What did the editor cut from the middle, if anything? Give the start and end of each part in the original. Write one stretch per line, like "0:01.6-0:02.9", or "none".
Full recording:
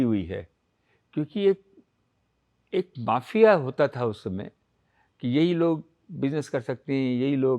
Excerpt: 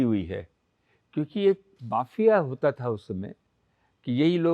0:01.8-0:02.9